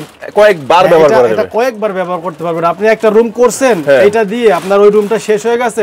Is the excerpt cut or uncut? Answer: uncut